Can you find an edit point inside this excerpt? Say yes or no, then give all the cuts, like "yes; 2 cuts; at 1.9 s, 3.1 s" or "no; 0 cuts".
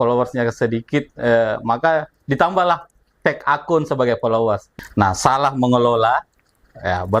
yes; 1 cut; at 4.7 s